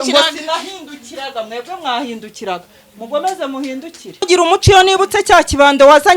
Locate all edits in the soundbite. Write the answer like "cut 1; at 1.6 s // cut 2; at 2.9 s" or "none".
cut 1; at 4.0 s